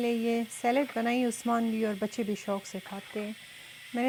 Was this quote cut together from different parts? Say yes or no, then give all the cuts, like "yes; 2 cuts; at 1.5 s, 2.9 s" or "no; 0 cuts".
no; 0 cuts